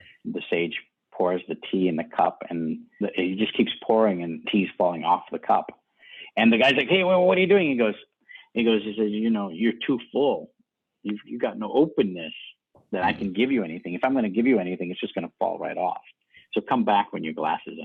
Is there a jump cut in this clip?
no; 0 cuts

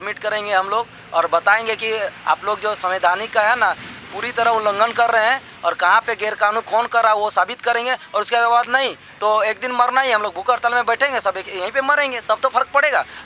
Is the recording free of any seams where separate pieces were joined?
yes; 0 cuts

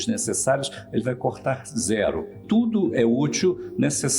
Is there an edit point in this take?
yes; 1 cut; at 2.4 s

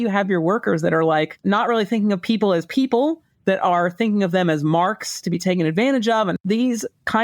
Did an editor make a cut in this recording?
yes; 2 cuts; at 1.4 s, 6.3 s

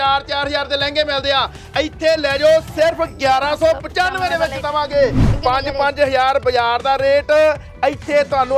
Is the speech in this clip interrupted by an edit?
yes; 1 cut; at 5.3 s

